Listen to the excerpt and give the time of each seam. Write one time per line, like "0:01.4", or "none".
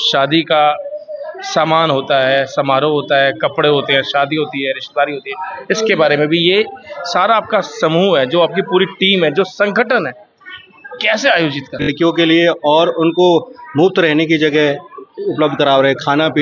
0:11.9